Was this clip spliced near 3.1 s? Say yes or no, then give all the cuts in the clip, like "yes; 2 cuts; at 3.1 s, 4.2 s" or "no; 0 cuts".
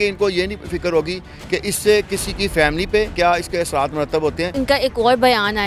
yes; 2 cuts; at 3.1 s, 4.5 s